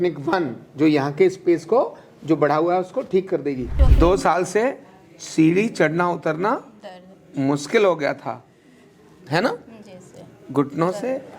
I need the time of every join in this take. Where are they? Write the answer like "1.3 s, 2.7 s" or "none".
3.8 s

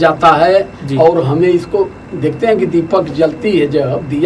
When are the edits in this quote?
none

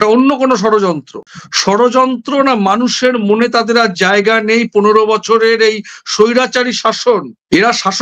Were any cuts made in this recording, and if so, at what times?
none

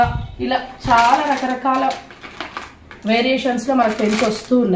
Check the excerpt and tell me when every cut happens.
none

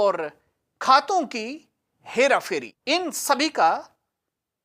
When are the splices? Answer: 2.7 s

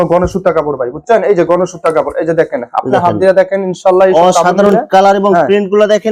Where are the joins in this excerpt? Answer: none

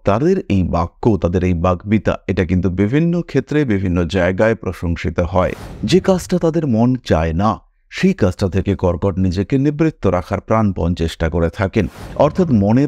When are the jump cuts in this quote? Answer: 5.7 s

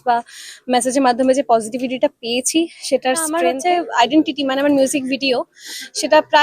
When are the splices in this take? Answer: 3.5 s

